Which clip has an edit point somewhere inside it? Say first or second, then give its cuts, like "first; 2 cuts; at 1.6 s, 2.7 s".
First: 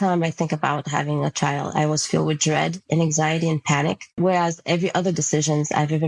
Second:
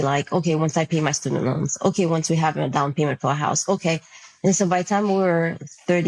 first; 1 cut; at 4.1 s